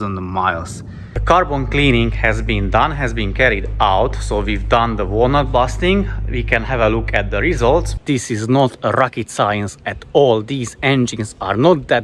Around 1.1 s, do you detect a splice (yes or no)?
yes